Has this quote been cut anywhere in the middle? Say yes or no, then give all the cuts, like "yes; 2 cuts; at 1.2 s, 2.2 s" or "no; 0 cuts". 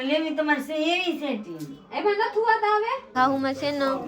yes; 1 cut; at 3.1 s